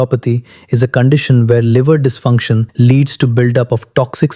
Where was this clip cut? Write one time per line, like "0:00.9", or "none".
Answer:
0:02.7